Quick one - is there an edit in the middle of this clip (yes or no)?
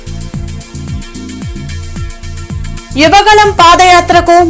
no